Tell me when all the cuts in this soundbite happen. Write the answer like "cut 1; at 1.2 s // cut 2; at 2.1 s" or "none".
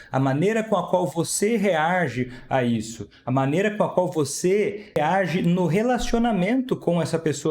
cut 1; at 5.0 s